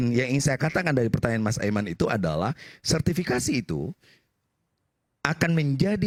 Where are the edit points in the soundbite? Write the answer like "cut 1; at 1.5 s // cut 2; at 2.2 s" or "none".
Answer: none